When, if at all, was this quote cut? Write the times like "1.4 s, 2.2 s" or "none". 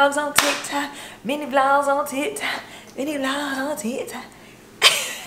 none